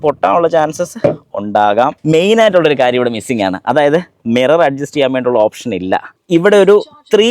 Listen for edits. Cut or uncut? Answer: cut